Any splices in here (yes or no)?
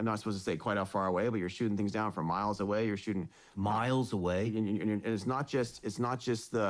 no